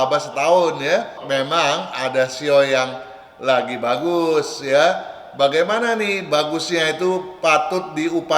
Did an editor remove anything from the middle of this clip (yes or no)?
yes